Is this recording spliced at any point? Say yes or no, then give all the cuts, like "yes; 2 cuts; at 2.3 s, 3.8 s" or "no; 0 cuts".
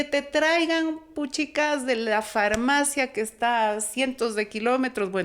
no; 0 cuts